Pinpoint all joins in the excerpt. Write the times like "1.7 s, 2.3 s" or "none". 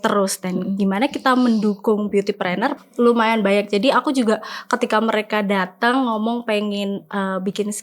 2.8 s